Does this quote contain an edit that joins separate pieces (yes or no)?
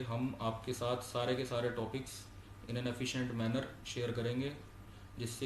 no